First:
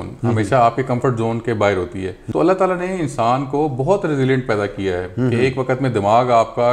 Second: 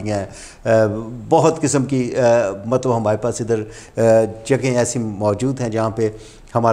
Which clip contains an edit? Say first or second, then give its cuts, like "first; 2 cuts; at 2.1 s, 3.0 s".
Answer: first; 1 cut; at 2.2 s